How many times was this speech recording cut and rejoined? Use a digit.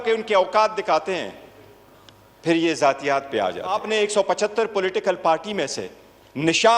1